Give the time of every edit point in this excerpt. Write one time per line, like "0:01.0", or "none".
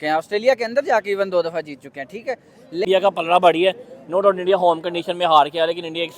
0:02.8